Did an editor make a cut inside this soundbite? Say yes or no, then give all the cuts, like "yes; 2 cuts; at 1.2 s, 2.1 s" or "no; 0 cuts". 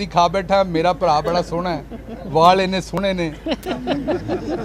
no; 0 cuts